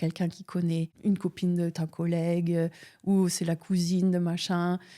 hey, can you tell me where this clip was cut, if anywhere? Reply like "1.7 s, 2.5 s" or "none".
0.9 s